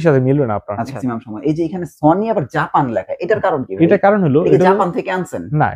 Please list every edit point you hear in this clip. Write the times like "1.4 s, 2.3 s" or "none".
1.1 s